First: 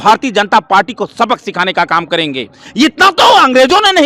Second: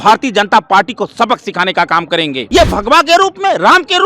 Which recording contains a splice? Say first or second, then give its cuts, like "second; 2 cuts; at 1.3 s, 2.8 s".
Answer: second; 1 cut; at 2.4 s